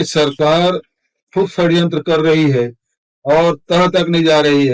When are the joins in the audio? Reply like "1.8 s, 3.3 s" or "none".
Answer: none

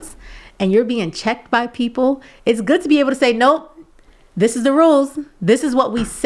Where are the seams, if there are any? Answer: none

